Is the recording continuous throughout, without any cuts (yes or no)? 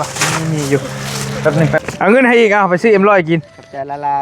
no